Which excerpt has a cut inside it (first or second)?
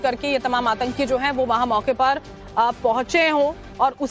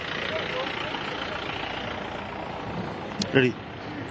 first